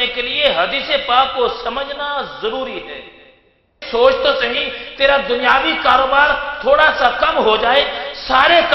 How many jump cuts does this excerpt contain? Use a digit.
1